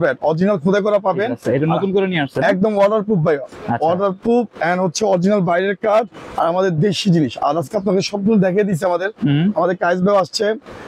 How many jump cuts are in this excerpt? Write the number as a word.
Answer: zero